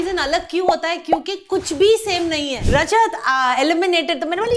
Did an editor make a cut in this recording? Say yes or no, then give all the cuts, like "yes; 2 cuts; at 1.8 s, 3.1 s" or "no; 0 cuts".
yes; 1 cut; at 2.6 s